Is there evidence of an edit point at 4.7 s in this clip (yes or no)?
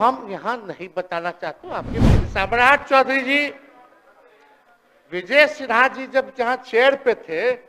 no